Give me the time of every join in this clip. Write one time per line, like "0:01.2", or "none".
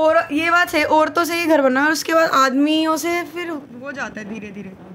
none